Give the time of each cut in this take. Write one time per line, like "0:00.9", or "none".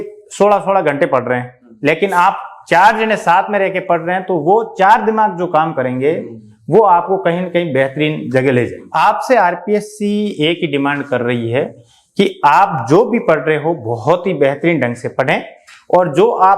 0:08.8